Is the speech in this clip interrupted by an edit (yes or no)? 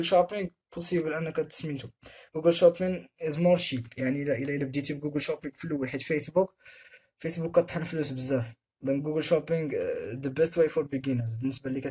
no